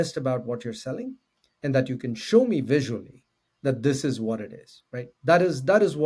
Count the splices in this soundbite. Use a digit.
0